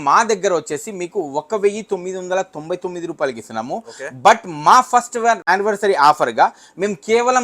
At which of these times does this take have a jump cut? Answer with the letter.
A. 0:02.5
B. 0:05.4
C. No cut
B